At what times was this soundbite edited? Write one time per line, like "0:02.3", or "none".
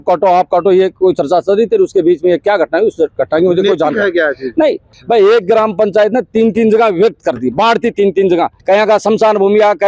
0:04.9
0:08.5